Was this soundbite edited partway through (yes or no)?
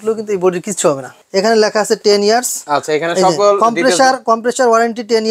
yes